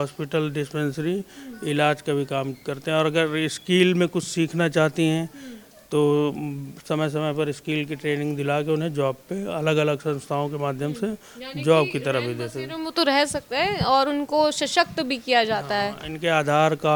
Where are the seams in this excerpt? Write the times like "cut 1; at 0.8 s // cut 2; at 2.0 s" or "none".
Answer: none